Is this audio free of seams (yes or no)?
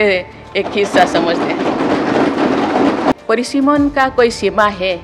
no